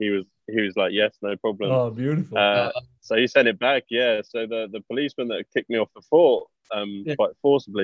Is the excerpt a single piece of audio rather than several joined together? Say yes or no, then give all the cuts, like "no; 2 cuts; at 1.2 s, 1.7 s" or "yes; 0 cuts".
yes; 0 cuts